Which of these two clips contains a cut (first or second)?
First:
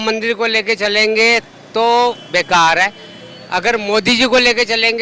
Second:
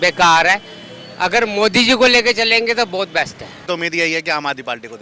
second